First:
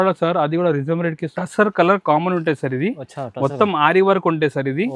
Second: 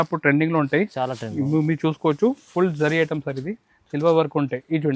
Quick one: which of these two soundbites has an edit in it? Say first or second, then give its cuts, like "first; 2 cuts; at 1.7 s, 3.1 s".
first; 1 cut; at 1.4 s